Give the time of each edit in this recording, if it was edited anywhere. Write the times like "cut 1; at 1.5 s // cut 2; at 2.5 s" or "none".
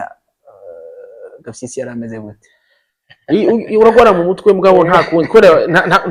none

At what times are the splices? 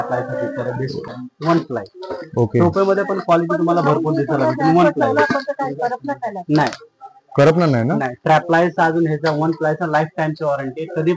cut 1; at 1.0 s

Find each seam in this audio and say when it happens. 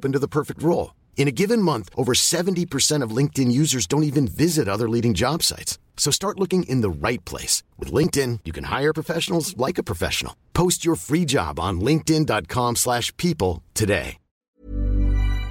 cut 1; at 14.6 s

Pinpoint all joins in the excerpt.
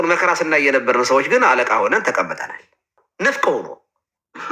cut 1; at 3.0 s

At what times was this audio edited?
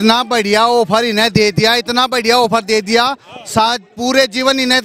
none

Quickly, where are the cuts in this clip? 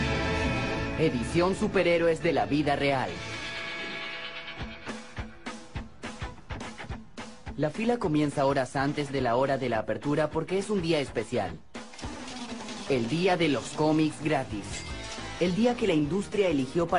cut 1; at 15.2 s

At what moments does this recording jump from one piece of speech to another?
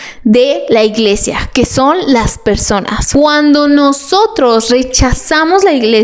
cut 1; at 3.0 s

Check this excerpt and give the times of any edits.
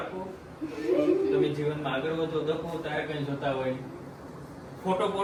none

